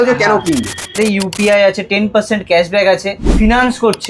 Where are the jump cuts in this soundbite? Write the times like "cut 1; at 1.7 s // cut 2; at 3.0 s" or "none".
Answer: cut 1; at 1.0 s // cut 2; at 3.3 s